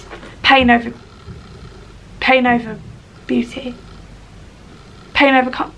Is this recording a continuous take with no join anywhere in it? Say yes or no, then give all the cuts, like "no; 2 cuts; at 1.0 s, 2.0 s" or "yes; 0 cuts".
yes; 0 cuts